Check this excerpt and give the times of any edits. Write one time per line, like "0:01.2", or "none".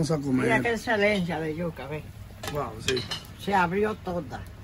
none